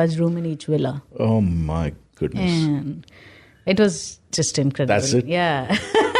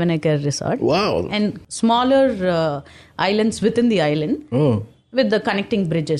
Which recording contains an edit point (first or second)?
second